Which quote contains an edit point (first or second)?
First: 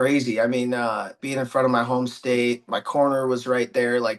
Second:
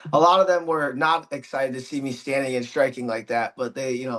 first